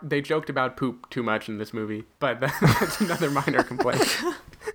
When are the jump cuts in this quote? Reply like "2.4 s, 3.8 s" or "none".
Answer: 2.1 s